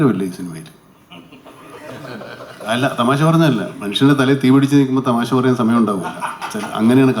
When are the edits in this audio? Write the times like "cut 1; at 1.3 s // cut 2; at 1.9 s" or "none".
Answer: none